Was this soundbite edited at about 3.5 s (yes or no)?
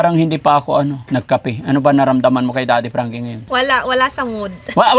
yes